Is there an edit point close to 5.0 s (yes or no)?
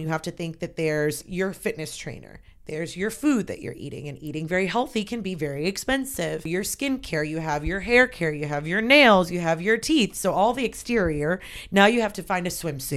no